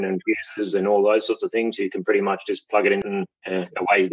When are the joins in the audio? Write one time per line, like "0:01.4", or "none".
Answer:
0:03.0